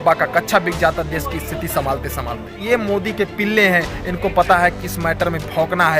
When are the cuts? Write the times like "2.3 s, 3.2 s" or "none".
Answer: 2.6 s